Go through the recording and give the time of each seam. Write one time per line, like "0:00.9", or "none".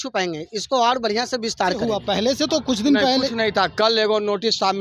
0:02.0